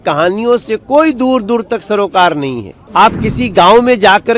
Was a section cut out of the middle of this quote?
yes; 1 cut; at 2.7 s

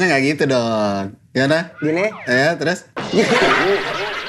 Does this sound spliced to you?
no; 0 cuts

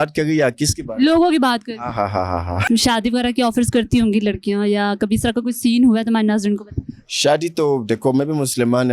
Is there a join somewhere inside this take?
yes; 1 cut; at 2.6 s

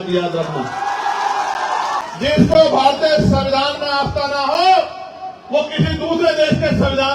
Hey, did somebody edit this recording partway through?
yes; 1 cut; at 2.0 s

